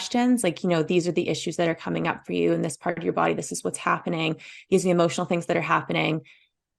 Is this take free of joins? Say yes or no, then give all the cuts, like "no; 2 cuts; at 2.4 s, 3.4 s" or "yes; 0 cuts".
yes; 0 cuts